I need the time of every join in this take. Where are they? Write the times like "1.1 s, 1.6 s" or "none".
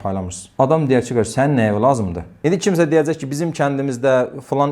2.3 s

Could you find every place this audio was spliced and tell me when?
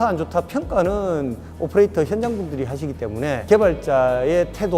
3.4 s

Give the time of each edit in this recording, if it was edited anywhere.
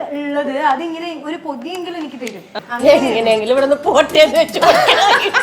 2.5 s

